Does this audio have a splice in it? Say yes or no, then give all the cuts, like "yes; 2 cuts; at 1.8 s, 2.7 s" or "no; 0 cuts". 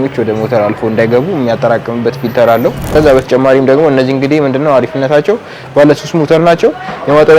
yes; 1 cut; at 2.8 s